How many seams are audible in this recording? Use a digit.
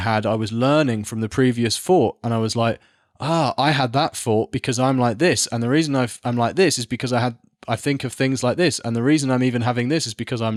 0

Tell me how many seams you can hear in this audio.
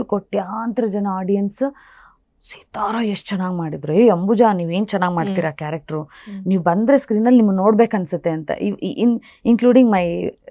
0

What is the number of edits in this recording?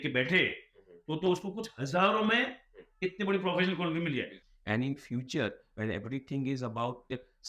1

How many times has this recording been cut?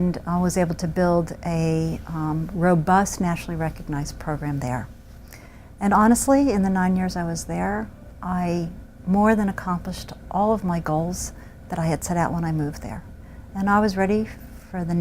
1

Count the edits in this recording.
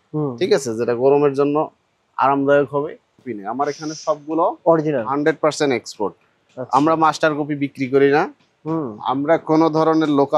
1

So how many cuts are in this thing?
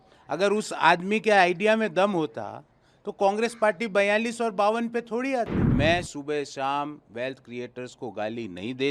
1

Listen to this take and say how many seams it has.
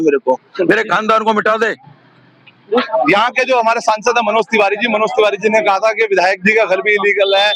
1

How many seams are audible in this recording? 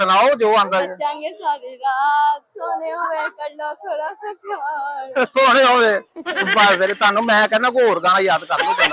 0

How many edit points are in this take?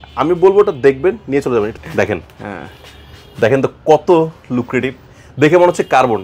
1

